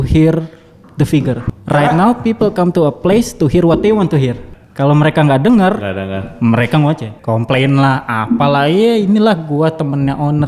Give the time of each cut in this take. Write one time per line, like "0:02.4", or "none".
0:01.5
0:04.5
0:07.1